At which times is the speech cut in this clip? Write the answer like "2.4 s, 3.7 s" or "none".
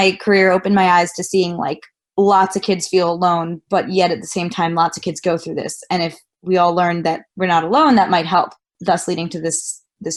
none